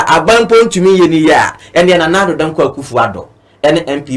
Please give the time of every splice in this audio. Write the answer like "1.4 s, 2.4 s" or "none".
none